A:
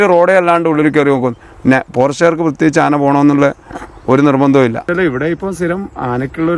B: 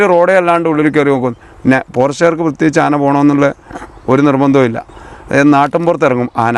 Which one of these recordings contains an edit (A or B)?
A